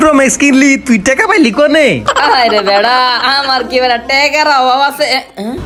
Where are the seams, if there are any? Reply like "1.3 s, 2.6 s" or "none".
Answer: none